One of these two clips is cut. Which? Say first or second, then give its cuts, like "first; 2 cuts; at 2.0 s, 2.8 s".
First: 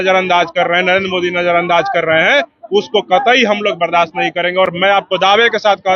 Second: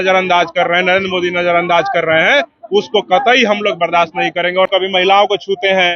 second; 1 cut; at 4.7 s